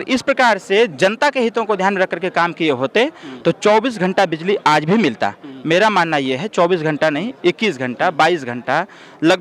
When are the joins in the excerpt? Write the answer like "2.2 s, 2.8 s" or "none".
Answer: none